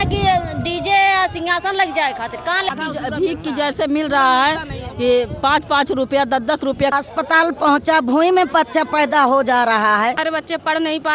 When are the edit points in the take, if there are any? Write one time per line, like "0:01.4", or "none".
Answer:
0:02.7
0:06.9
0:10.2